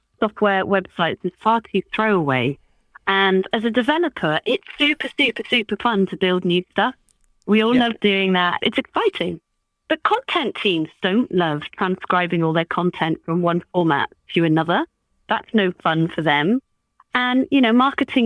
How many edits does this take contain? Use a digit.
2